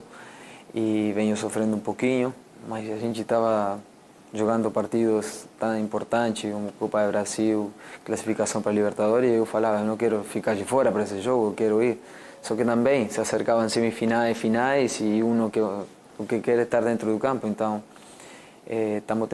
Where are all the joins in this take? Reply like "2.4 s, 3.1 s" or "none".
none